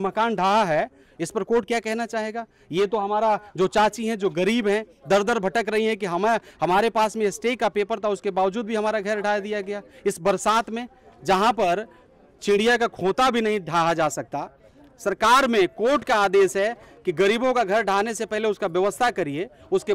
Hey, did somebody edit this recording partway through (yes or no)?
no